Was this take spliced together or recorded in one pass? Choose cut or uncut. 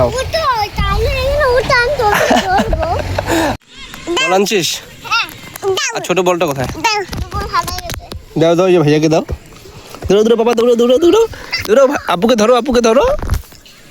cut